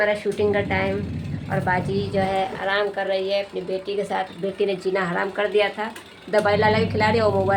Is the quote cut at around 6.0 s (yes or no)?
no